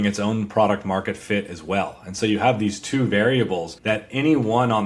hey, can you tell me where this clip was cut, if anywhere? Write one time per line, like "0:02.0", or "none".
0:03.7

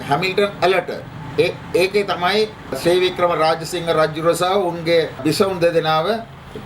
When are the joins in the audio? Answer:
0:02.8
0:05.2

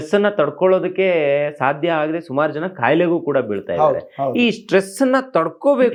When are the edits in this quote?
none

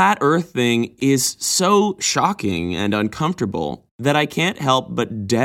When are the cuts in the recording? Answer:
0:00.9

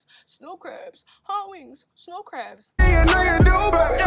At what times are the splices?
0:02.8

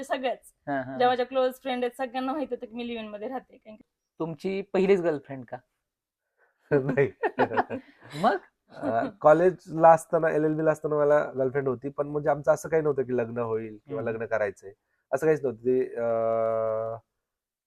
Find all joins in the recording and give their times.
0:03.8

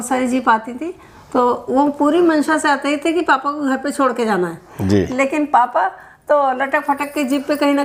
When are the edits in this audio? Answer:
none

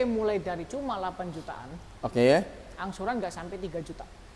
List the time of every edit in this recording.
none

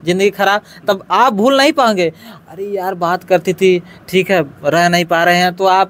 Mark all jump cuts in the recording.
none

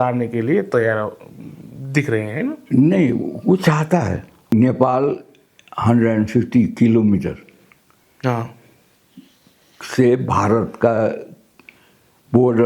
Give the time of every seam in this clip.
0:04.5

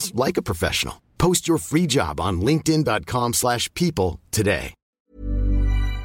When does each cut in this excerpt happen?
0:05.0

